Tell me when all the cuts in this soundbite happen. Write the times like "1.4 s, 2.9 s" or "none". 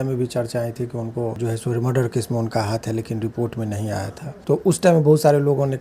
1.4 s, 4.3 s